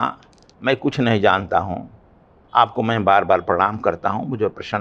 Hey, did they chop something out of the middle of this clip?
no; 0 cuts

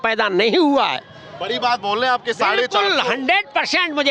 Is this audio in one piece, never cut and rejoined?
yes; 0 cuts

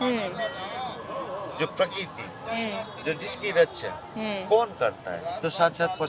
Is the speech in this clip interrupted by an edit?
no; 0 cuts

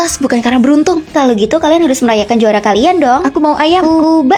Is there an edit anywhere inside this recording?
no; 0 cuts

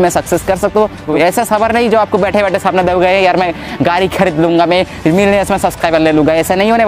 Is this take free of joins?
no; 1 cut; at 1.1 s

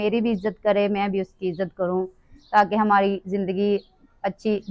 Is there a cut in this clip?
no; 0 cuts

